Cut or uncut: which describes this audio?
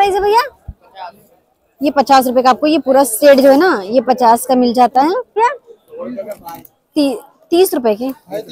cut